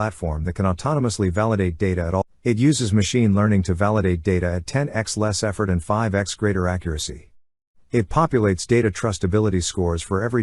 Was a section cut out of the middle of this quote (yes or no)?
yes